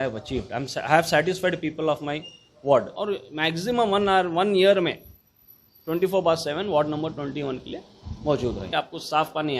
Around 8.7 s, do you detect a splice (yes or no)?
yes